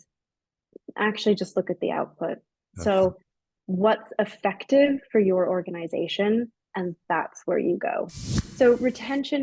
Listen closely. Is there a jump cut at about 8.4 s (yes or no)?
yes